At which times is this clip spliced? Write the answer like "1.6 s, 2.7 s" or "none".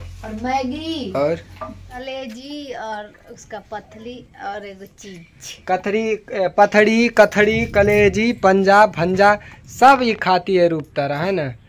2.0 s